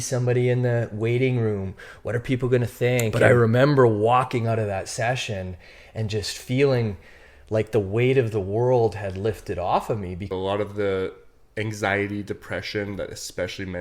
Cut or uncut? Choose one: cut